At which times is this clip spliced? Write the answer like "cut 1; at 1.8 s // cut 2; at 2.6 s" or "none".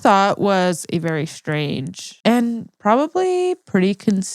none

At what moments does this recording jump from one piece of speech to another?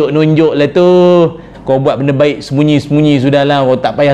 cut 1; at 1.5 s

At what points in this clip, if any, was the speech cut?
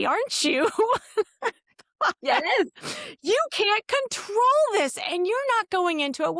none

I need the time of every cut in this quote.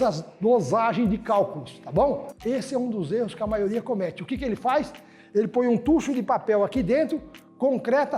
cut 1; at 2.3 s

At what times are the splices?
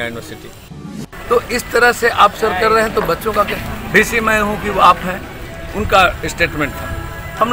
cut 1; at 1.0 s

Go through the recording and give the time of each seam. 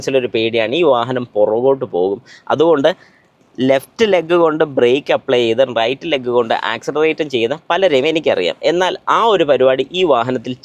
none

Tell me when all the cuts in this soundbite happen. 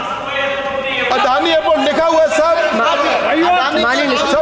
cut 1; at 1.1 s

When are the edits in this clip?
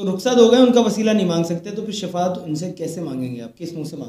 none

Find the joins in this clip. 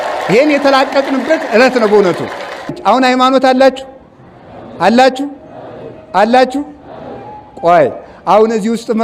cut 1; at 2.8 s

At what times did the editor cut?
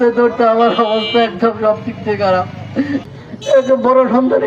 cut 1; at 3.1 s

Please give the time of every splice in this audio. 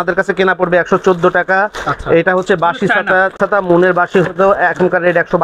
cut 1; at 3.4 s

